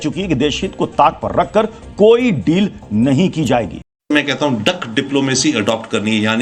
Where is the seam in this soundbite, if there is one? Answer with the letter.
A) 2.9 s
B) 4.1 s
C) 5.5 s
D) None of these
B